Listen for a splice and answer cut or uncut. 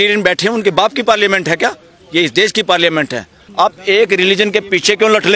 cut